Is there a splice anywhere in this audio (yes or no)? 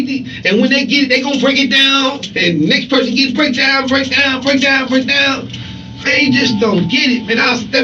no